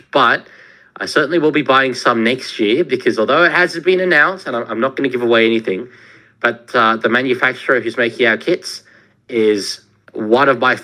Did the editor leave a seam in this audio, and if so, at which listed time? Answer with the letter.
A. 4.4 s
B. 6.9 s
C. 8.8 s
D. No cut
D